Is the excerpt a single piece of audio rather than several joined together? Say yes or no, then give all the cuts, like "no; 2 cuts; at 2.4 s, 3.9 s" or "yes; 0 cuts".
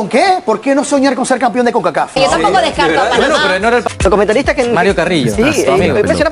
no; 2 cuts; at 2.2 s, 3.9 s